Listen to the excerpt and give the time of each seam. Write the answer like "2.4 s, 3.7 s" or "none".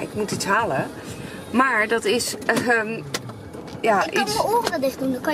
none